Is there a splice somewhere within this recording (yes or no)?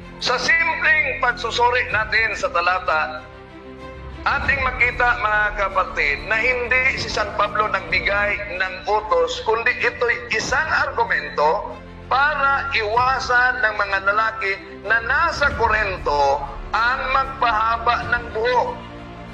no